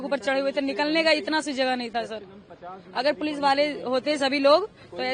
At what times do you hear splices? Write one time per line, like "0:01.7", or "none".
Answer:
none